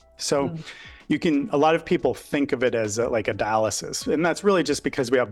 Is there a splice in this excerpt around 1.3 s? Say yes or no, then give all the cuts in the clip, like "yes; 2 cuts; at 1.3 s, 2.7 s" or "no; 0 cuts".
no; 0 cuts